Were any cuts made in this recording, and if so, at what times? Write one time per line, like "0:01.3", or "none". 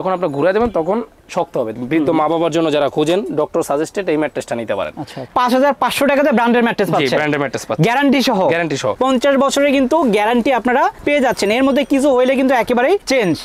0:01.8
0:05.3
0:08.9